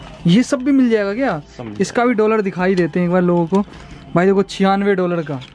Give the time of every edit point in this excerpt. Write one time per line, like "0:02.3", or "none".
none